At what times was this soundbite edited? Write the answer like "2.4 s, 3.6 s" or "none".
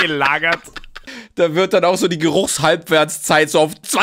1.2 s